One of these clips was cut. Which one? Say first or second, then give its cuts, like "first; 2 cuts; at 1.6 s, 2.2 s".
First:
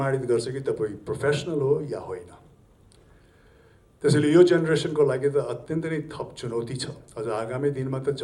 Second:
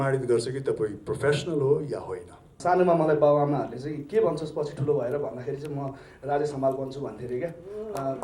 second; 1 cut; at 2.6 s